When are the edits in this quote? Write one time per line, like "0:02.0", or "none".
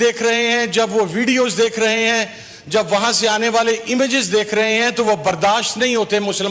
none